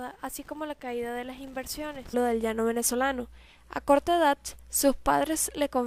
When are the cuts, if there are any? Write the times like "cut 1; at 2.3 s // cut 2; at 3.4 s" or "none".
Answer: none